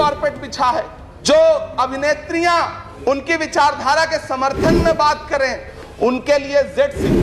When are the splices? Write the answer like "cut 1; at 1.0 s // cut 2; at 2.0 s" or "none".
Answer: cut 1; at 1.0 s // cut 2; at 2.8 s // cut 3; at 5.7 s

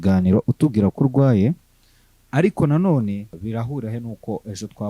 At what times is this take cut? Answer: cut 1; at 3.3 s

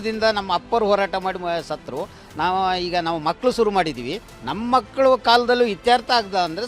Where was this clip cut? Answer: none

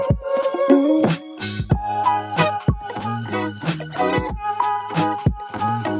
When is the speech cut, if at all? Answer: cut 1; at 1.0 s

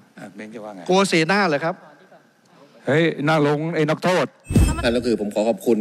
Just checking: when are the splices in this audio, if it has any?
cut 1; at 4.8 s

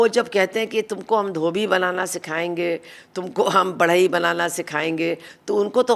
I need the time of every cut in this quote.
none

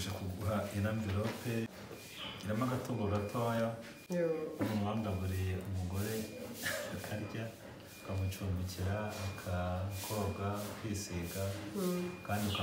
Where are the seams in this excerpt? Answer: cut 1; at 1.7 s

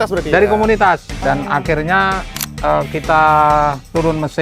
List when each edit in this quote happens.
cut 1; at 1.1 s

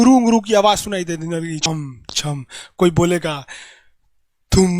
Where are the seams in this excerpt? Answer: cut 1; at 1.6 s

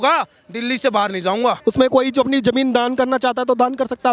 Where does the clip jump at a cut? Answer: cut 1; at 1.6 s

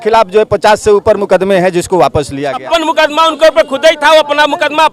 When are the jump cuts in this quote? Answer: cut 1; at 2.6 s

